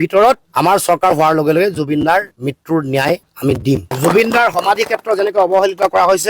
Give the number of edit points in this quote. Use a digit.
1